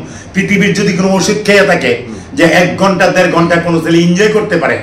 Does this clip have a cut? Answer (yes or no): no